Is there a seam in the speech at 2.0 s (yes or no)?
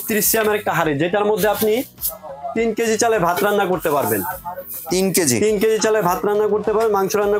no